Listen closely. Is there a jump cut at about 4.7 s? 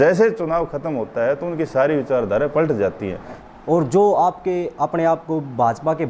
no; 1 cut; at 3.4 s

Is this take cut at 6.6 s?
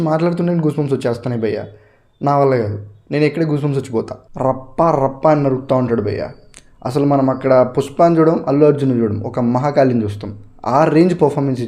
no; 1 cut; at 4.2 s

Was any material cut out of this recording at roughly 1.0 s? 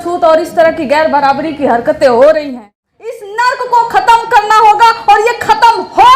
no; 1 cut; at 3.2 s

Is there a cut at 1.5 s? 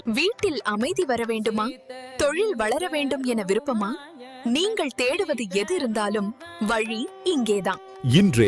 no; 0 cuts

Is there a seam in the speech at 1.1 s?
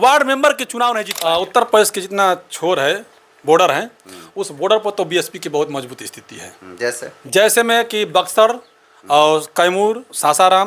yes; 1 cut; at 1.1 s

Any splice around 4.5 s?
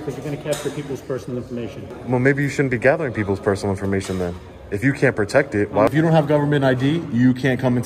no; 2 cuts; at 2.0 s, 5.9 s

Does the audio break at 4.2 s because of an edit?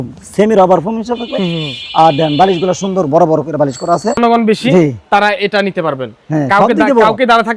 yes; 1 cut; at 4.2 s

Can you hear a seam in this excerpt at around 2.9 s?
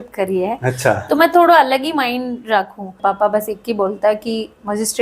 yes; 1 cut; at 2.9 s

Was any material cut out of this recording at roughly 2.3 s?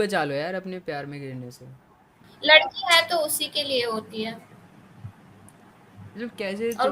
yes; 1 cut; at 2.3 s

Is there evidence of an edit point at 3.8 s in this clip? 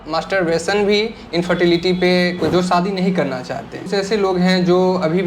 yes; 2 cuts; at 2.5 s, 3.8 s

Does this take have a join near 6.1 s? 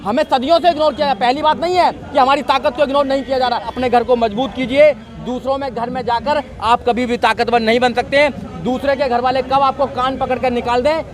no; 1 cut; at 3.7 s

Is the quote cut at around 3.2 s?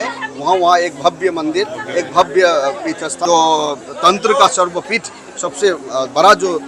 yes; 1 cut; at 3.2 s

